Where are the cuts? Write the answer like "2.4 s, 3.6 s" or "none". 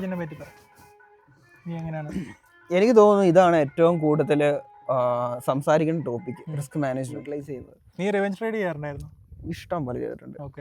7.3 s